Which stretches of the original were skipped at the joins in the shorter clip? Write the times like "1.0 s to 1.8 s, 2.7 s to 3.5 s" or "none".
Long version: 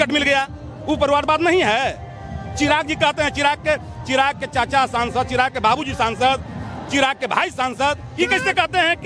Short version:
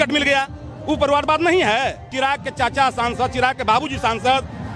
2.0 s to 4.0 s